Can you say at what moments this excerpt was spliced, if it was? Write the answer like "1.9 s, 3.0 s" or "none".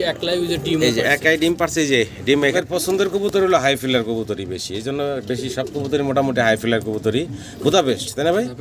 2.5 s